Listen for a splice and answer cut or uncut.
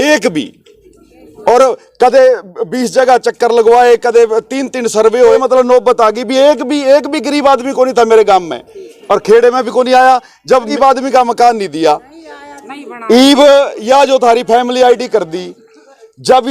cut